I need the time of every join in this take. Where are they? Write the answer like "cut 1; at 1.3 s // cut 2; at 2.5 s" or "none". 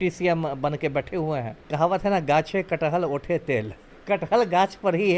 cut 1; at 1.6 s // cut 2; at 3.9 s